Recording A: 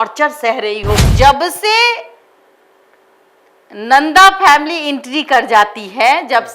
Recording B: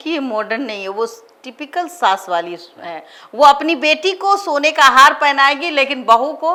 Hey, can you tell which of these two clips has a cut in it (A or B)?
A